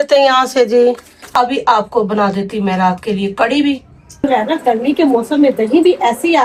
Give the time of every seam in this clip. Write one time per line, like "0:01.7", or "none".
0:01.3
0:04.2